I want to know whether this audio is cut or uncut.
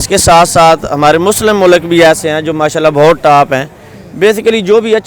uncut